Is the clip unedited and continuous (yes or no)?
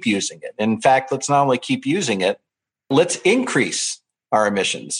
no